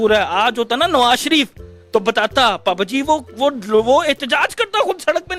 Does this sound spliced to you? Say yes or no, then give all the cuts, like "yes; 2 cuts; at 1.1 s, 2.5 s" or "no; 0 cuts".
no; 0 cuts